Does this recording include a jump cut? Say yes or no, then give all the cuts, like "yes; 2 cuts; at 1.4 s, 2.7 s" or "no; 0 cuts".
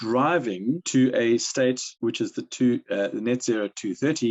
yes; 2 cuts; at 0.8 s, 1.9 s